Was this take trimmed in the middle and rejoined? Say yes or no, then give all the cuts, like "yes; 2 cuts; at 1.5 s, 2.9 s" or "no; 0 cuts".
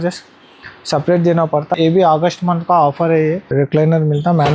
yes; 2 cuts; at 1.7 s, 3.5 s